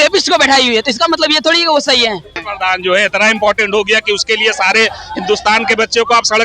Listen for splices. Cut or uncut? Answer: cut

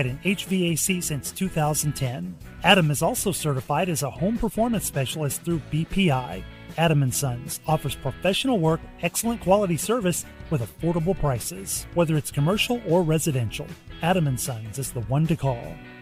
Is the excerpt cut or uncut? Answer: uncut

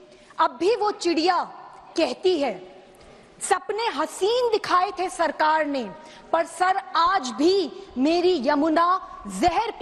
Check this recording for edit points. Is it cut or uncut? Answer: uncut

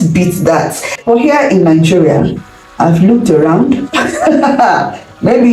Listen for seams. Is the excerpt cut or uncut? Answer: cut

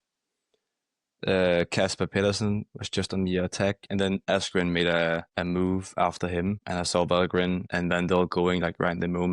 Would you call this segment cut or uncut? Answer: cut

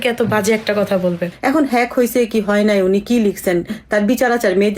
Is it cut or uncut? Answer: cut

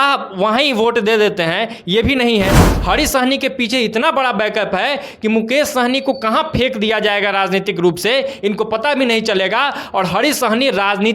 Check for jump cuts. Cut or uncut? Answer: cut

